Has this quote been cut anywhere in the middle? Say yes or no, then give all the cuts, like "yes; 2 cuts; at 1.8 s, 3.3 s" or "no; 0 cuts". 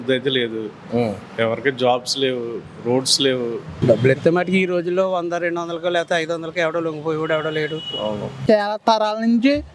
yes; 2 cuts; at 3.7 s, 8.4 s